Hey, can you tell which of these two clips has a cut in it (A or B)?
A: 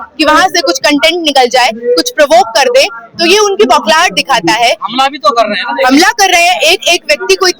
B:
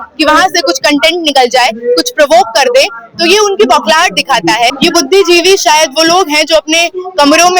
B